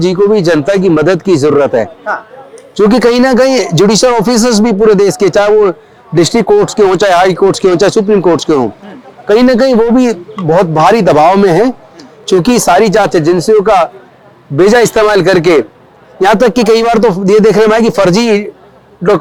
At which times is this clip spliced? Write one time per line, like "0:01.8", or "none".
none